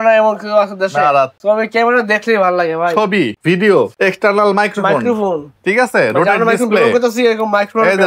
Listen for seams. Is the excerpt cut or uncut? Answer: uncut